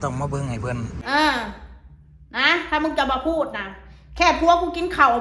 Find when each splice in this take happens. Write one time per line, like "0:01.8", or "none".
0:01.0